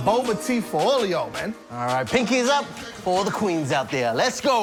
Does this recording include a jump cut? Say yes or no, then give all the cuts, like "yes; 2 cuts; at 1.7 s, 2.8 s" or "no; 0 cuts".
no; 0 cuts